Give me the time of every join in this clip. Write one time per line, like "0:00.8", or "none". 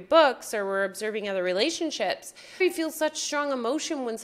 0:02.6

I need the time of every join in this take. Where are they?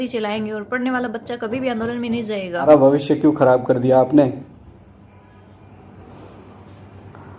0:02.7

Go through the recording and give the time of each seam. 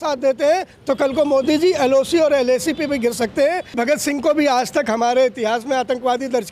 0:03.7

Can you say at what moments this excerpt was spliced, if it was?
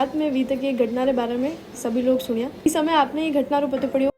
0:02.7

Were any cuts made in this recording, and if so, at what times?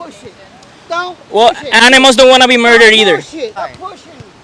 0:01.7
0:03.6

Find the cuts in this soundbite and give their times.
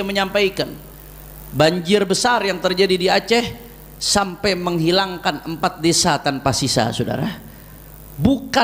none

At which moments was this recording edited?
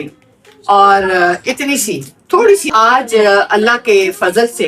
0:02.7

